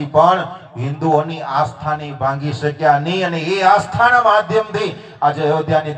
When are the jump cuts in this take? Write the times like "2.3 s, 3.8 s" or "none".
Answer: none